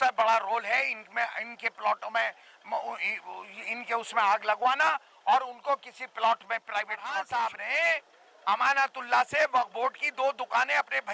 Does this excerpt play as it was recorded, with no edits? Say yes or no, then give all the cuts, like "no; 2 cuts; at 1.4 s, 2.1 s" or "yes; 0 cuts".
no; 1 cut; at 7.1 s